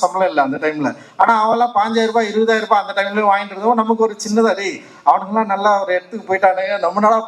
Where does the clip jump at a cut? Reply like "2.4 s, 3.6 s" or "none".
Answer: none